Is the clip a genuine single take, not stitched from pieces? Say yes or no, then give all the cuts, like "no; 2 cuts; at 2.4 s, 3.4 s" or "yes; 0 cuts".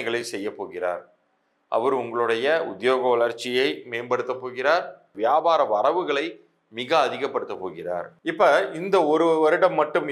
no; 2 cuts; at 5.1 s, 8.1 s